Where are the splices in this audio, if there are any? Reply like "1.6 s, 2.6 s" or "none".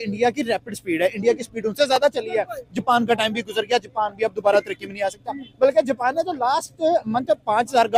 none